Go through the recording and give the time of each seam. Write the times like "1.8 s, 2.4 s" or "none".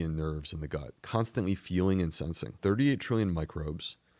1.0 s, 2.5 s

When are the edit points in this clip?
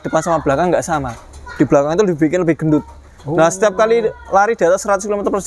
none

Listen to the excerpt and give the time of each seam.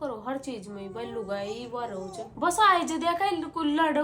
2.3 s

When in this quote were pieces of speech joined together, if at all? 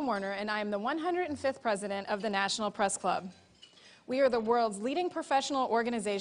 none

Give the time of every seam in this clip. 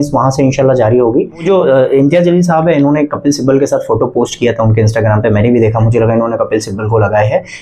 1.4 s

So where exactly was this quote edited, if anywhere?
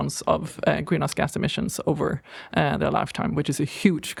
none

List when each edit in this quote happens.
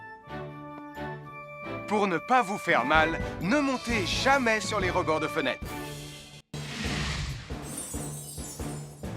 6.4 s

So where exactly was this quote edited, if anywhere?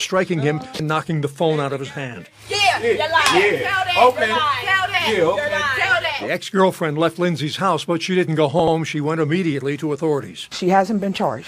1.7 s

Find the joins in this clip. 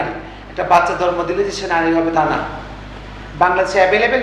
none

